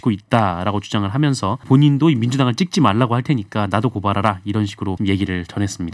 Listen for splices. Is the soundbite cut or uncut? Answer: cut